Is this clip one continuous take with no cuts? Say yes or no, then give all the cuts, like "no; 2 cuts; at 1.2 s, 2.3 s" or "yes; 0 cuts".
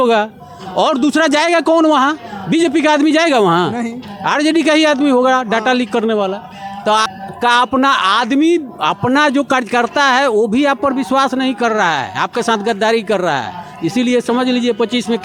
yes; 0 cuts